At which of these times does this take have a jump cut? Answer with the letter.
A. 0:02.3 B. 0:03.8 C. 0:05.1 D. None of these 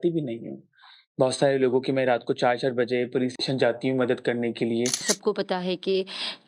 C